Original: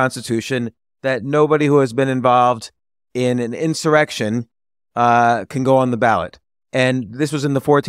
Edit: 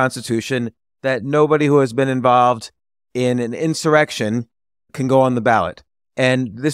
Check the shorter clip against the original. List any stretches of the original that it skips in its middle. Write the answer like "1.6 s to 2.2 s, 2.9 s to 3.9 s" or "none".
4.9 s to 5.4 s